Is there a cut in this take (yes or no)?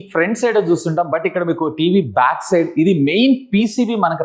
no